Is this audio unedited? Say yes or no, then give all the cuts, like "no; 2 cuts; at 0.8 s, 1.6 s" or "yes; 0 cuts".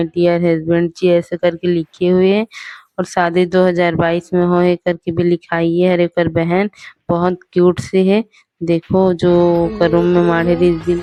yes; 0 cuts